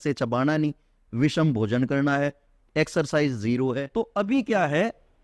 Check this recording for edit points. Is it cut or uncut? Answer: cut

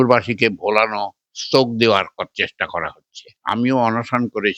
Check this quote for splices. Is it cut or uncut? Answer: cut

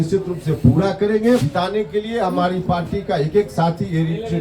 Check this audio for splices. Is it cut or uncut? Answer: cut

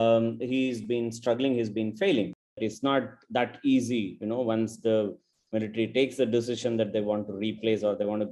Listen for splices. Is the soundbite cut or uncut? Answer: cut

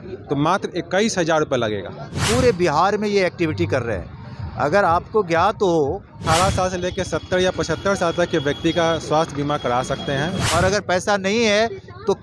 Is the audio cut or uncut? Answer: cut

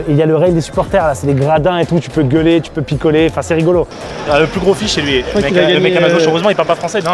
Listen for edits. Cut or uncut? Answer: cut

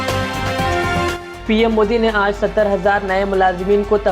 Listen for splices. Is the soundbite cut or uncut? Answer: uncut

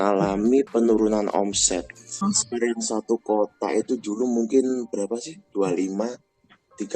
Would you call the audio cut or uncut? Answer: cut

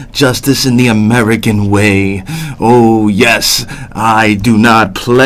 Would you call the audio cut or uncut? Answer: cut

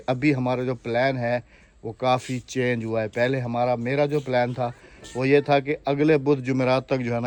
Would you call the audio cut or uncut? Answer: uncut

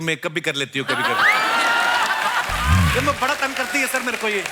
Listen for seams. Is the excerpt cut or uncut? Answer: uncut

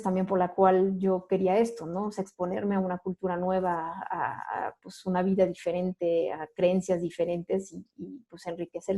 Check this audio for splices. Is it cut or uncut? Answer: uncut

